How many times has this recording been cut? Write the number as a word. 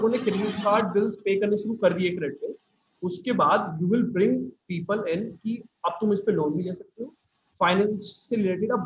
zero